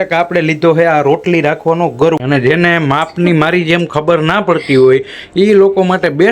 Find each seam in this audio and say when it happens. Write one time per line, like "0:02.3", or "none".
0:02.2